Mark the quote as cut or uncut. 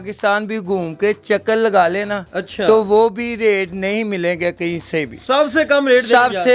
uncut